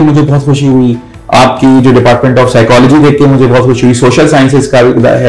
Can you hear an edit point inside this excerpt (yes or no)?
no